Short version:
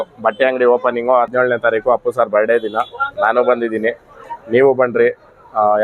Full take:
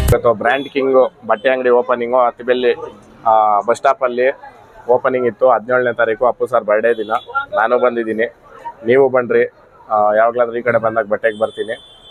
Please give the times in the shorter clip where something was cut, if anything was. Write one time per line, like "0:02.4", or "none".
0:01.3